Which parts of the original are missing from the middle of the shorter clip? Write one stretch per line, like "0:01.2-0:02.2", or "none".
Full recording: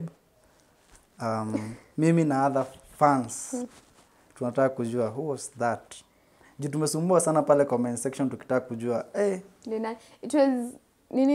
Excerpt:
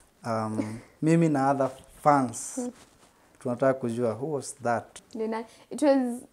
0:06.0-0:09.5